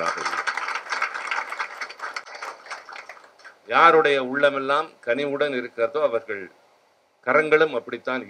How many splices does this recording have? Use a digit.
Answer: 0